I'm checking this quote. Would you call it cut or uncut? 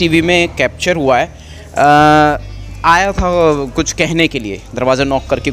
uncut